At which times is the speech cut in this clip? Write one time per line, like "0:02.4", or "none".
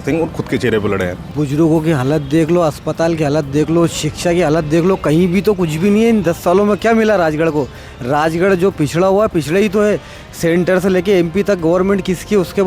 0:01.2